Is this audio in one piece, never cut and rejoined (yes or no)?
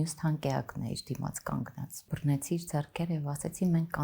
no